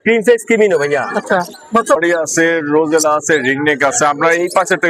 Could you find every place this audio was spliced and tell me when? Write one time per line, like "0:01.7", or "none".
0:02.0